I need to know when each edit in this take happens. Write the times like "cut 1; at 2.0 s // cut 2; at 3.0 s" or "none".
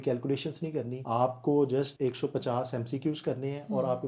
cut 1; at 1.0 s // cut 2; at 1.9 s